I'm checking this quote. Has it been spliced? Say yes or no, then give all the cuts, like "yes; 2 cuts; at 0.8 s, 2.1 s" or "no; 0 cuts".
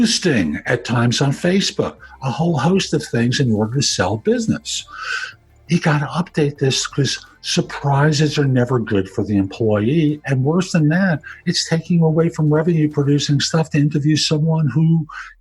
no; 0 cuts